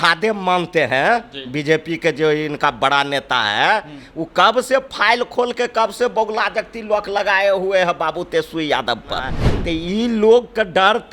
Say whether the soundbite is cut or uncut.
cut